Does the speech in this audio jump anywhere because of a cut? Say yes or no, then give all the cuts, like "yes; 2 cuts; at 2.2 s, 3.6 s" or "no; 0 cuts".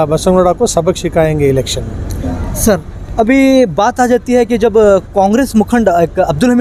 no; 0 cuts